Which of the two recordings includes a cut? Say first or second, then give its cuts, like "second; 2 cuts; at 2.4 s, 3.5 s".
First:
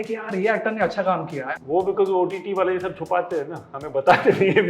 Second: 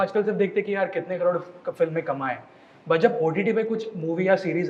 first; 1 cut; at 1.5 s